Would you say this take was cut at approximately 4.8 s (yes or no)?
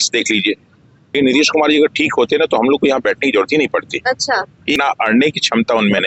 yes